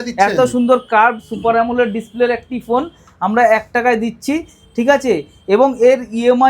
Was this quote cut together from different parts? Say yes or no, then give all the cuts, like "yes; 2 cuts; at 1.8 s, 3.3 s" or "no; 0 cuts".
no; 0 cuts